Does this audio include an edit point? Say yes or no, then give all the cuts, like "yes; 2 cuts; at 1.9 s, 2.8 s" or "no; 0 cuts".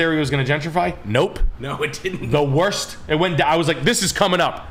no; 0 cuts